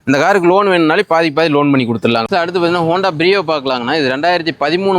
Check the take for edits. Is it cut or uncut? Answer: cut